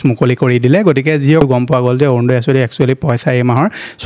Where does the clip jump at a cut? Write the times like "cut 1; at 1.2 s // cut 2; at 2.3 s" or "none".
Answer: cut 1; at 1.4 s